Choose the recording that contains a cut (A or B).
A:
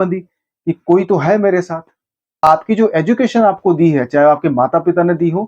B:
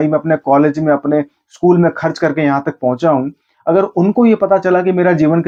A